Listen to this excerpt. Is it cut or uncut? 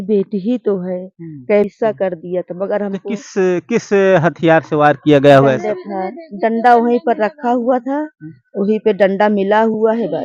cut